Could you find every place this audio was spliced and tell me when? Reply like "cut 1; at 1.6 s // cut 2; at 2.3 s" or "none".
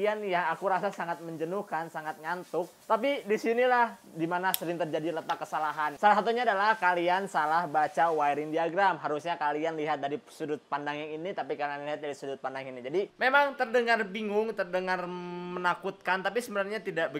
cut 1; at 13.1 s